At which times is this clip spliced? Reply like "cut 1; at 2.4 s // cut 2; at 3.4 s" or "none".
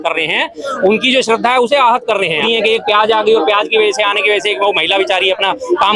cut 1; at 2.5 s